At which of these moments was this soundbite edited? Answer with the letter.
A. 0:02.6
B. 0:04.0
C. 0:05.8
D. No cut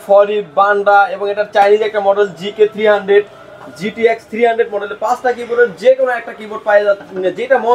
D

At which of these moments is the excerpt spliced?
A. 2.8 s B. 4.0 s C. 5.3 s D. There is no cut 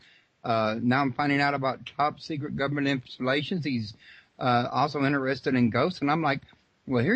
A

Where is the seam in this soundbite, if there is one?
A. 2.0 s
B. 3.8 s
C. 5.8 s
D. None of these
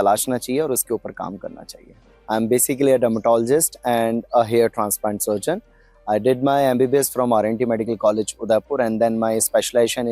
A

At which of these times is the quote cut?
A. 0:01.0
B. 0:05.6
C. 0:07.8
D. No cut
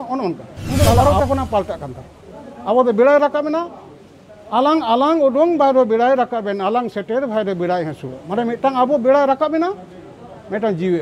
A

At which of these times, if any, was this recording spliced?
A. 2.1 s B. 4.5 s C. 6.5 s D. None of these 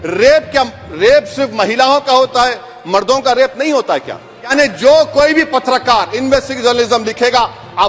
B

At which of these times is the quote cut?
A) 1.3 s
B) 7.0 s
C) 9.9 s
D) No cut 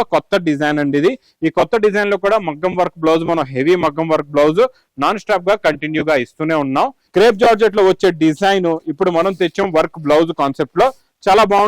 B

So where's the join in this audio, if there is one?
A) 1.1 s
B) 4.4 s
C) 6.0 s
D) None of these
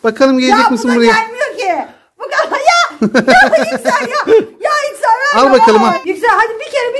C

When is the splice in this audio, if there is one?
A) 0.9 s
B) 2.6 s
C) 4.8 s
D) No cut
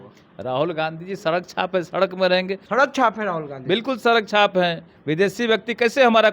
B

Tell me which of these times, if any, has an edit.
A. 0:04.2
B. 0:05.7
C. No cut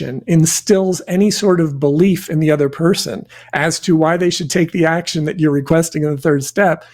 B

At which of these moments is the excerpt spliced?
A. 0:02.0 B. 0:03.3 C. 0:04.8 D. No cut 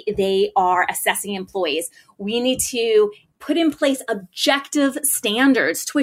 B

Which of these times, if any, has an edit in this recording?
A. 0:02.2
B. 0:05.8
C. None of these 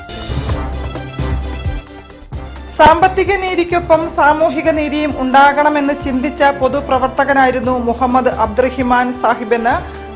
A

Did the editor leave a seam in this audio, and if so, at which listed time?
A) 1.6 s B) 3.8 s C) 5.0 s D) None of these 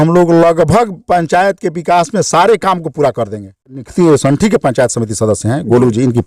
B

